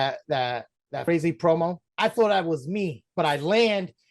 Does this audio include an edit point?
yes; 3 cuts; at 1.0 s, 1.8 s, 3.0 s

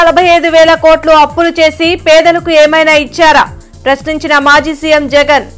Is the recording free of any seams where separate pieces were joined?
yes; 0 cuts

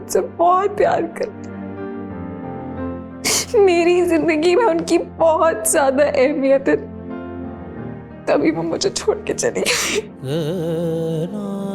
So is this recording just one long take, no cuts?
yes; 0 cuts

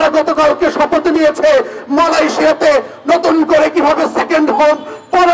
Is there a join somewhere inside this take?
no; 0 cuts

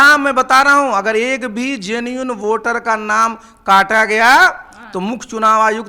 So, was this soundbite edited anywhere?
no; 0 cuts

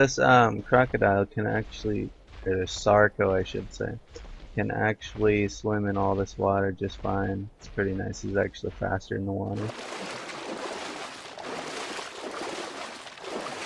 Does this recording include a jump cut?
no; 0 cuts

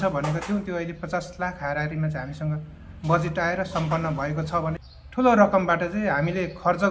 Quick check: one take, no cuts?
no; 1 cut; at 4.9 s

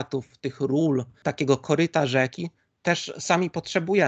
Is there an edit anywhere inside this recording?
yes; 1 cut; at 1.2 s

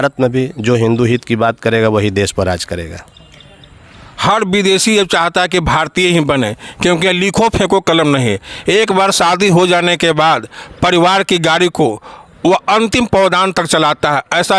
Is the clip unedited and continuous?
yes; 0 cuts

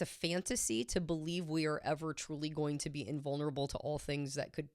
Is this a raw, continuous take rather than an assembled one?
yes; 0 cuts

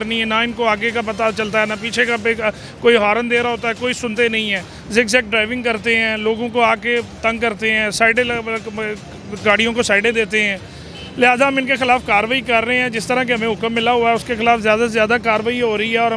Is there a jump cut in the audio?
no; 0 cuts

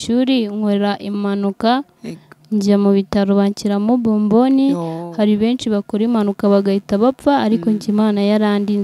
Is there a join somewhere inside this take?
no; 0 cuts

